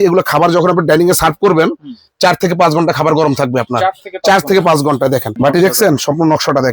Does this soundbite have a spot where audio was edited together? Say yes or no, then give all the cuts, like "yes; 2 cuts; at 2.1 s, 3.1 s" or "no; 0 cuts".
yes; 1 cut; at 5.3 s